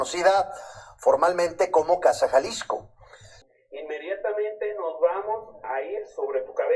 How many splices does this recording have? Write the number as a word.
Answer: one